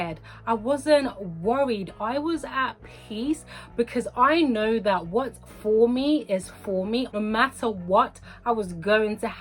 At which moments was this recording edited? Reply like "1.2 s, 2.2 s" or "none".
7.1 s